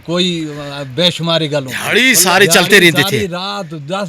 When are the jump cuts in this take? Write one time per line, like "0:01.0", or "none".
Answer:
0:01.8